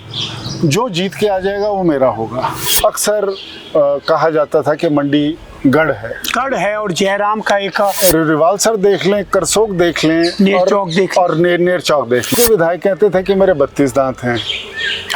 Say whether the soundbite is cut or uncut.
cut